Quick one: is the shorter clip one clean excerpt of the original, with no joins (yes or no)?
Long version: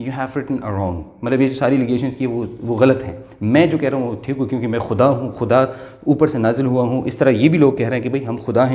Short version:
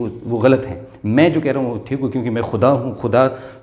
yes